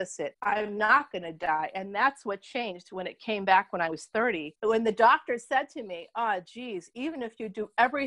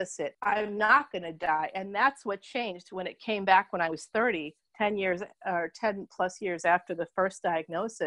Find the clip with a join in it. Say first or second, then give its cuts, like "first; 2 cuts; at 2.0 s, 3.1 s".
first; 1 cut; at 4.5 s